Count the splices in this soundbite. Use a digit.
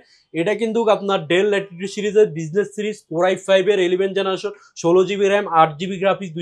0